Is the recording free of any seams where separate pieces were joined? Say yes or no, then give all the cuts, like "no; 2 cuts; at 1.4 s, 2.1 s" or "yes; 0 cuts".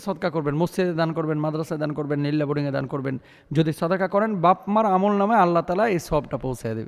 yes; 0 cuts